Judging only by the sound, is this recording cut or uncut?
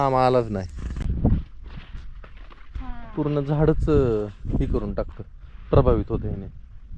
cut